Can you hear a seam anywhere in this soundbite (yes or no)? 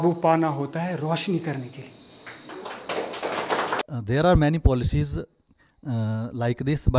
yes